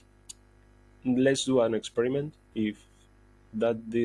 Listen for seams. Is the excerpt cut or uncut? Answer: cut